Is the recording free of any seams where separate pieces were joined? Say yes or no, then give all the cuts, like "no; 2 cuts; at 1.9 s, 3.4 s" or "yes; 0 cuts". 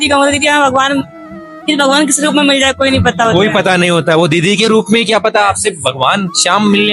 yes; 0 cuts